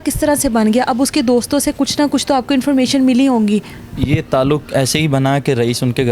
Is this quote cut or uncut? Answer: uncut